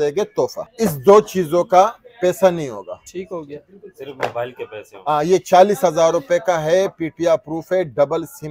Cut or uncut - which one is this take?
uncut